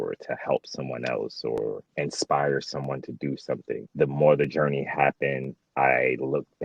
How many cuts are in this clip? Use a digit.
2